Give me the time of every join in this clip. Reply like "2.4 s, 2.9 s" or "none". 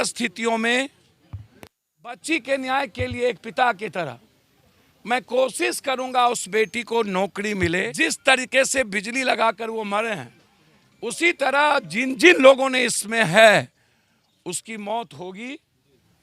7.9 s